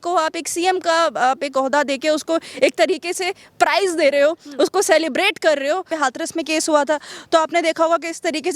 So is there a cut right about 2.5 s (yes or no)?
no